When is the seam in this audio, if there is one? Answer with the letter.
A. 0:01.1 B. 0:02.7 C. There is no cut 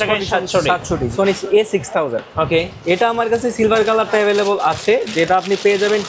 A